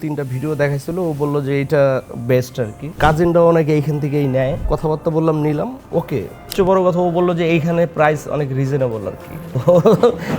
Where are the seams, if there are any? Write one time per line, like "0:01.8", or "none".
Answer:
0:03.0
0:04.6
0:06.5
0:09.5